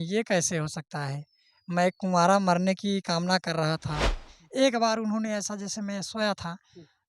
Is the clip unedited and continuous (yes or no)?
no